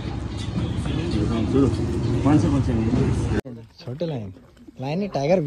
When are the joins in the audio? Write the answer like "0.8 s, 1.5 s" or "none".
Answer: 3.5 s